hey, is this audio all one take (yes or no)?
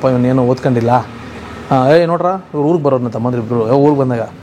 yes